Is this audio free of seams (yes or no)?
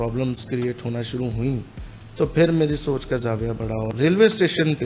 no